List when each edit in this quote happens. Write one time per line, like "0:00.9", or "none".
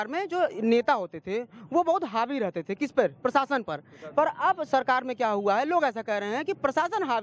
none